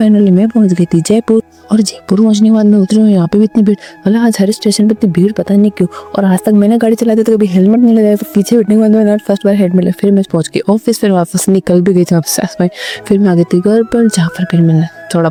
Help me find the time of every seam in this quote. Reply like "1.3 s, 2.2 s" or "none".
none